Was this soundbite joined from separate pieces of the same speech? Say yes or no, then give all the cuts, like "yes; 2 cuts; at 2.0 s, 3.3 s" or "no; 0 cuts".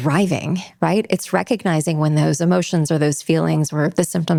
no; 0 cuts